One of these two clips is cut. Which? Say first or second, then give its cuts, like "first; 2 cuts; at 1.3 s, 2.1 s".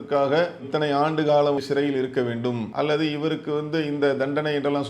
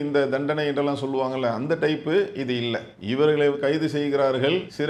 first; 2 cuts; at 1.6 s, 2.7 s